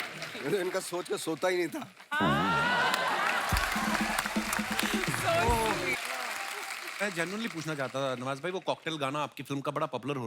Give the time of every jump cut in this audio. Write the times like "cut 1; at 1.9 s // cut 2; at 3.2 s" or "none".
cut 1; at 6.0 s